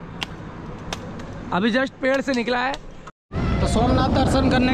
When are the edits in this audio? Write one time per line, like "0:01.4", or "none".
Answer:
0:03.2